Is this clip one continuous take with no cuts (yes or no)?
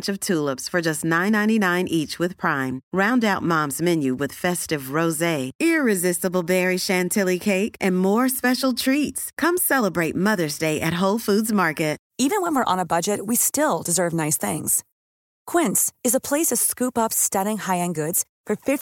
no